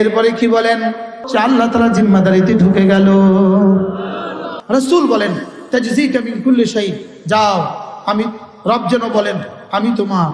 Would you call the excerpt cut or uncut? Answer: cut